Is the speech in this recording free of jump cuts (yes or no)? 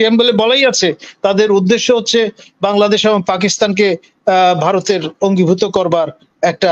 yes